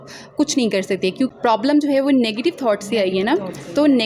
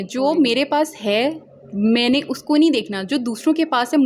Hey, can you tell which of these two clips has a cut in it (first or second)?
first